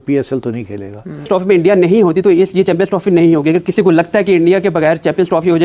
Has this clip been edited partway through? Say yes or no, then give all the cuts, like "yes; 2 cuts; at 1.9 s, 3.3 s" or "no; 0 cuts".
yes; 1 cut; at 1.3 s